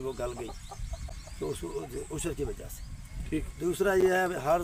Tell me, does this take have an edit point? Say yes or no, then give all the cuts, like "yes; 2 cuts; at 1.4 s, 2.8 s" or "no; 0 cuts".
no; 0 cuts